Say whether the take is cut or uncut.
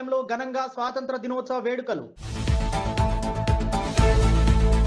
uncut